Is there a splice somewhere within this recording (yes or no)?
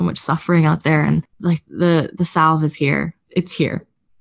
yes